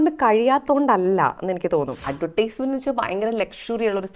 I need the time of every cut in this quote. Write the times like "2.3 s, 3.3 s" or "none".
2.1 s